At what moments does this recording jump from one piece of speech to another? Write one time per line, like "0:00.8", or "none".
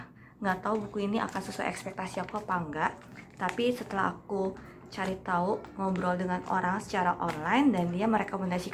none